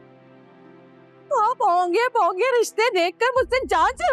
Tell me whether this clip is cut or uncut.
uncut